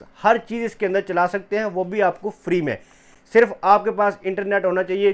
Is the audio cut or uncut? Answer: uncut